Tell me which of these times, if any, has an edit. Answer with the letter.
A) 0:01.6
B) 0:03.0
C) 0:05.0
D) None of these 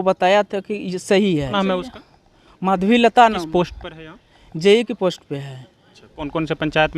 A